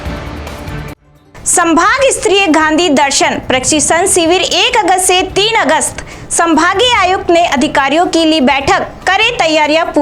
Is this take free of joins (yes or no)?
no